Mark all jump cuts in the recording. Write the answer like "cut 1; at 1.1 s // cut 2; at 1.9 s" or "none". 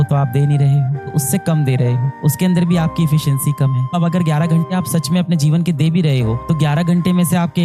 cut 1; at 1.1 s // cut 2; at 3.9 s